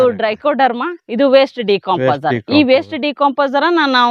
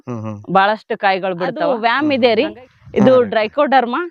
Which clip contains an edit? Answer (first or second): second